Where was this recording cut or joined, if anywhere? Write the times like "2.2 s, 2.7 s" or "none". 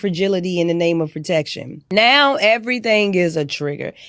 2.1 s

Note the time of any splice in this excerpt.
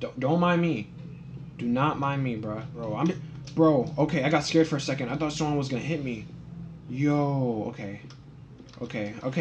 2.8 s

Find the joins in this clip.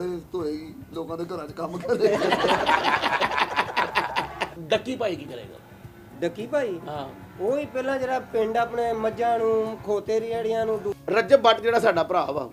4.5 s, 11.0 s

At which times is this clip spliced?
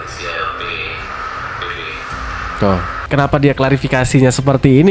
3.0 s

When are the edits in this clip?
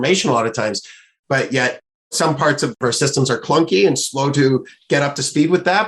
2.8 s

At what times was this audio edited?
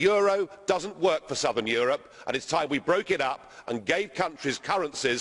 3.3 s

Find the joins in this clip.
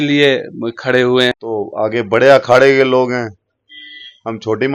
1.3 s

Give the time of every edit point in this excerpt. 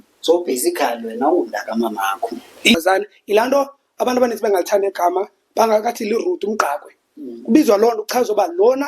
2.7 s

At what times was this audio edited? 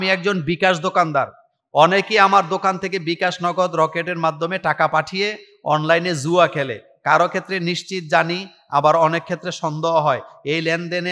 none

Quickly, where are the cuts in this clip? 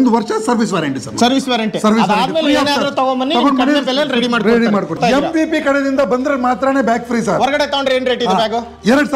5.0 s

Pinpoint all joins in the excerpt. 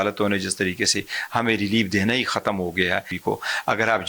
3.1 s

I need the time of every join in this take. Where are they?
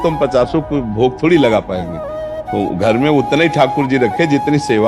none

